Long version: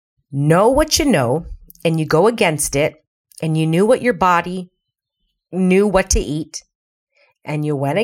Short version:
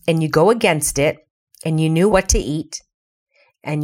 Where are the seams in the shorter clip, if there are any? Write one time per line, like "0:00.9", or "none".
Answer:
0:02.1